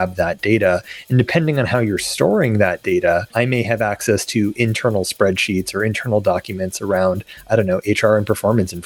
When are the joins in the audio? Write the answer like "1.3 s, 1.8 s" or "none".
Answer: none